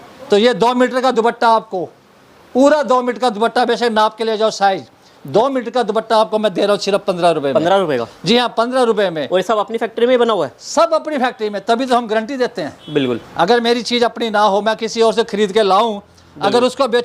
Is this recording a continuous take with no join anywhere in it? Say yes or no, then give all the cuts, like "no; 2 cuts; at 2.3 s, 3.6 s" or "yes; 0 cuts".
yes; 0 cuts